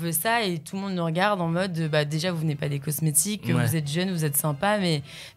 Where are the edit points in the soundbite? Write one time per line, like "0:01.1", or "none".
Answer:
none